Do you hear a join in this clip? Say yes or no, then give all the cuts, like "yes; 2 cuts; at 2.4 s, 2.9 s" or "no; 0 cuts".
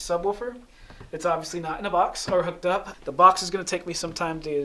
yes; 1 cut; at 2.9 s